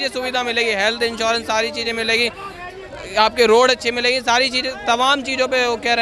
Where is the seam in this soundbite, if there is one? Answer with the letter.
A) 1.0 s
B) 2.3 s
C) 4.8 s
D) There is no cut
D